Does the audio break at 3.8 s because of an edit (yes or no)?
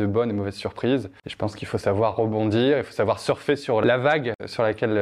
yes